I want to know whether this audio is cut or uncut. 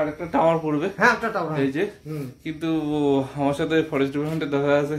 uncut